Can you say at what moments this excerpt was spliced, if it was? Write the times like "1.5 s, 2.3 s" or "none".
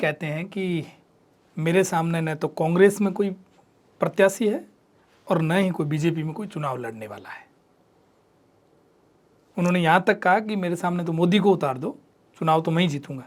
none